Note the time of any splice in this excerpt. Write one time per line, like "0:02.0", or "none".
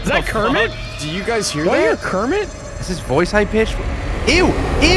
none